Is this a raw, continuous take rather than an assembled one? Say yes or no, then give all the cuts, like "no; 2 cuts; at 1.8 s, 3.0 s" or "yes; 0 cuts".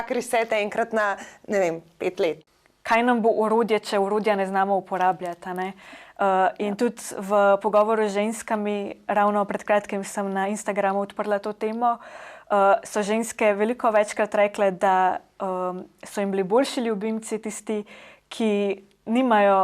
no; 1 cut; at 2.5 s